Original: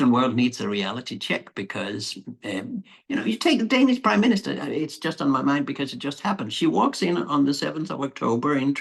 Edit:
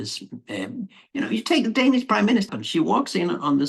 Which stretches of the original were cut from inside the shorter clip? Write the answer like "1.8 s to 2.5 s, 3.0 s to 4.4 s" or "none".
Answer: 4.5 s to 6.4 s